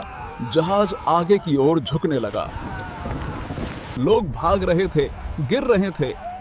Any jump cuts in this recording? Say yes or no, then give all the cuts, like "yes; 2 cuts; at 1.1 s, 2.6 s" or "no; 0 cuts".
yes; 1 cut; at 3.9 s